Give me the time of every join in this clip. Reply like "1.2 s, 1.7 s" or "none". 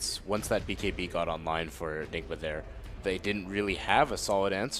1.7 s